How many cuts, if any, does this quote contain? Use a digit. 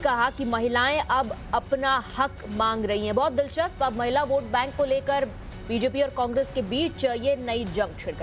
1